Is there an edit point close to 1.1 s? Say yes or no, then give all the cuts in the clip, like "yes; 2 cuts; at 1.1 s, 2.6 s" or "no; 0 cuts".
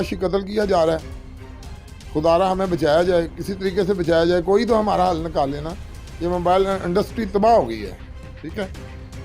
no; 0 cuts